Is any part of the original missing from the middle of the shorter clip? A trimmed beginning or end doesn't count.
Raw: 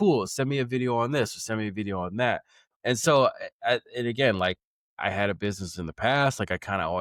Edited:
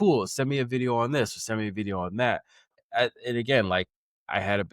yes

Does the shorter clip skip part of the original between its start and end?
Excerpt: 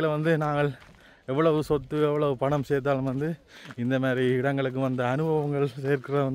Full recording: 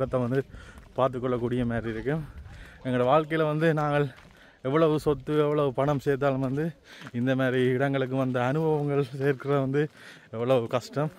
no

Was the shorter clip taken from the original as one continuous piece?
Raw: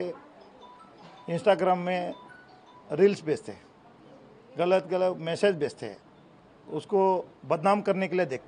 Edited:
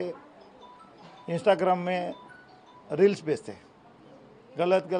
yes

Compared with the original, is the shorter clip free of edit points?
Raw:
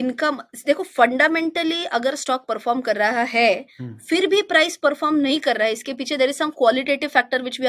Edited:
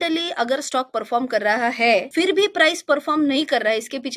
no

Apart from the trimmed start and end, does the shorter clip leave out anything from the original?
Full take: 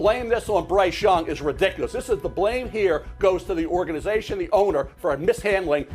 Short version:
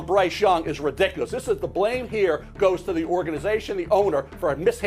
no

